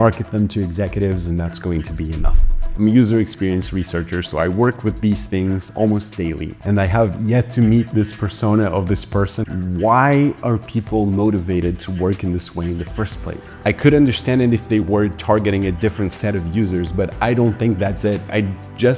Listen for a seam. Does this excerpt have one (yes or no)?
yes